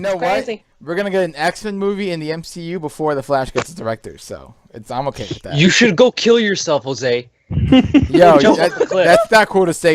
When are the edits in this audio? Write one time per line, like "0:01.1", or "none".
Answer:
none